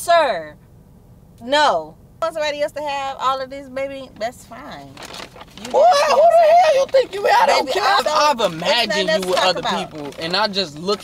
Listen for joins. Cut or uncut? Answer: cut